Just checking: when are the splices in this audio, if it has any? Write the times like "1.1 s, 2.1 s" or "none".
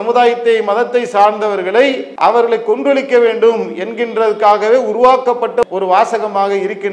2.1 s, 5.6 s